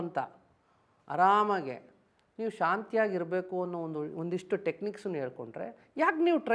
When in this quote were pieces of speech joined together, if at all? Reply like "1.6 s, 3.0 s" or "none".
none